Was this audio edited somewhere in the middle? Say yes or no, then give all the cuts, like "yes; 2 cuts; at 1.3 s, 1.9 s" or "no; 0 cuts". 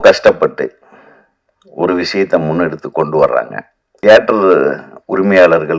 yes; 1 cut; at 4.0 s